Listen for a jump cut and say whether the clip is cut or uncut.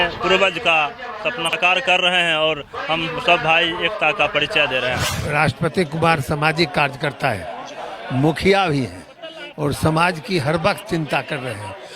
cut